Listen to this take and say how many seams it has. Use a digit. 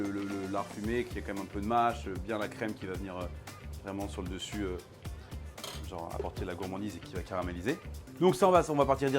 1